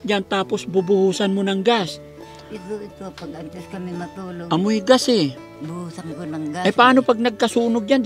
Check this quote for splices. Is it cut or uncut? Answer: uncut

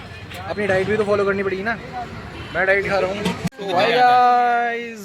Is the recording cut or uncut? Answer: cut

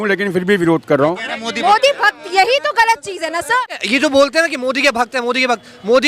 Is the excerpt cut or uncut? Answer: cut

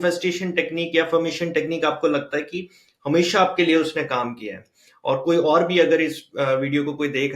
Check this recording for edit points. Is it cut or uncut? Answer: uncut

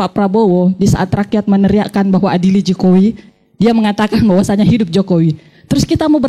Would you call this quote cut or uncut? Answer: uncut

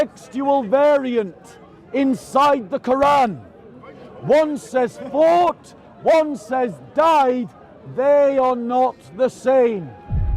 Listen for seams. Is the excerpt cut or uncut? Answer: uncut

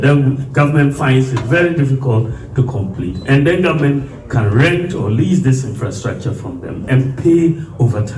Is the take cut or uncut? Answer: uncut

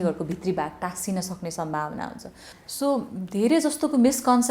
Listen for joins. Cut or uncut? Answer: cut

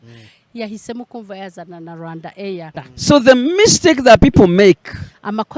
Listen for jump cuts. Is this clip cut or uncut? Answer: cut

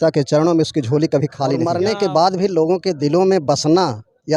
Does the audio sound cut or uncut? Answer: cut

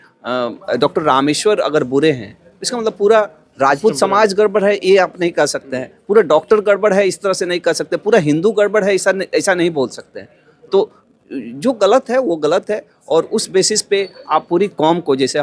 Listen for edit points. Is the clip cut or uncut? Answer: uncut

